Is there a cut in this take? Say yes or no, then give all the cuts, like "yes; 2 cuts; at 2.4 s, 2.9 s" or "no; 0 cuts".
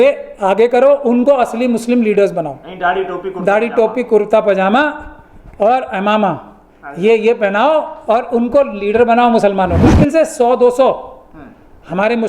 yes; 1 cut; at 9.8 s